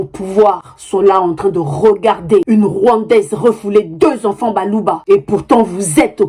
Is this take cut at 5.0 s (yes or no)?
no